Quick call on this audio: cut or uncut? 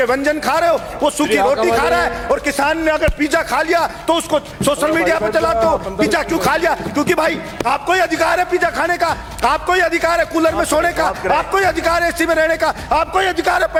uncut